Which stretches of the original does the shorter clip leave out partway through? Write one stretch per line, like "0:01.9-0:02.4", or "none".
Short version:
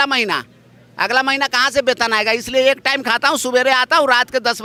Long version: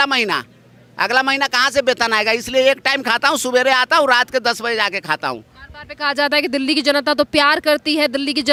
none